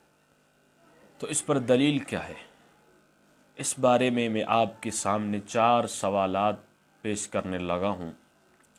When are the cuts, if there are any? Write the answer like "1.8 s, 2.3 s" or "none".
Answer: none